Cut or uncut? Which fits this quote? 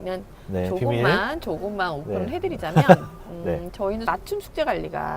cut